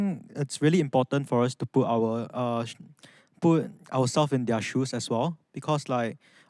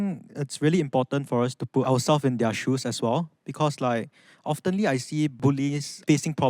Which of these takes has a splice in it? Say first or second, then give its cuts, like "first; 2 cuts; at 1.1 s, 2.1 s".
second; 2 cuts; at 1.9 s, 5.3 s